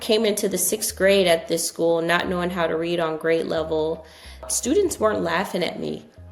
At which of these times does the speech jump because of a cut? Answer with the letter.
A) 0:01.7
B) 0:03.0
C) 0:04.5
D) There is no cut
C